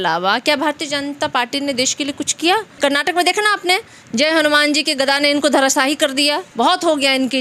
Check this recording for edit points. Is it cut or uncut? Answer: cut